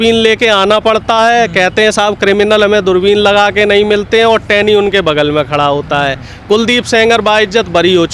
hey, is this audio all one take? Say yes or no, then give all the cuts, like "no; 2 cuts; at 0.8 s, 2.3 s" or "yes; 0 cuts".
yes; 0 cuts